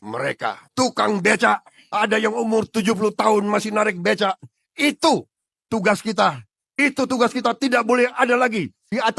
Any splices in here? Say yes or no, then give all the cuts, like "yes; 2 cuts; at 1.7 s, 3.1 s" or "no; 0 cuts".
no; 0 cuts